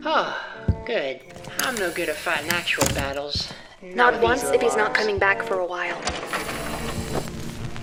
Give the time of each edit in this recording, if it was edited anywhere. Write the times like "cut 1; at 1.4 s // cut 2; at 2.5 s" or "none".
none